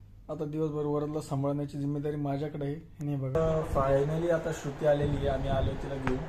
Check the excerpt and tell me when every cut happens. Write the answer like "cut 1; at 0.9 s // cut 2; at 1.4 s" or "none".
cut 1; at 3.3 s